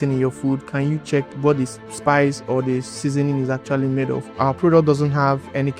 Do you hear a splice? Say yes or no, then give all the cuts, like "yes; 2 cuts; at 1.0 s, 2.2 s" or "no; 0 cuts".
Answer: yes; 2 cuts; at 1.3 s, 4.3 s